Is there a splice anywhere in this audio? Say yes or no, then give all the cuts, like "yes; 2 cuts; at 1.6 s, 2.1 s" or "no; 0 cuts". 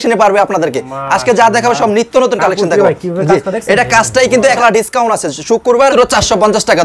yes; 2 cuts; at 4.6 s, 5.9 s